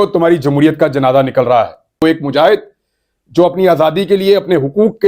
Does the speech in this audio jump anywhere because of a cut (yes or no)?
yes